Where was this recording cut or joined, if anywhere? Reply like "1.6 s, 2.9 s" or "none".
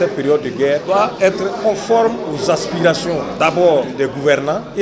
1.3 s, 2.3 s, 3.9 s